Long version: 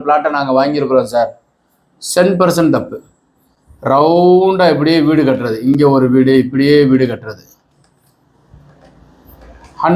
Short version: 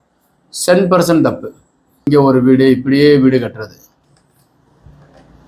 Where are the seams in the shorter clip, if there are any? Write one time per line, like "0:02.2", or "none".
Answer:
0:02.1